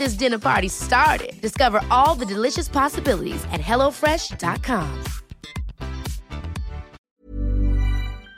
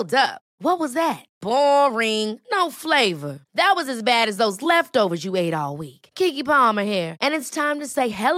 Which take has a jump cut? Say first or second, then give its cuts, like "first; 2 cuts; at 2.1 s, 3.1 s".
first; 1 cut; at 6.9 s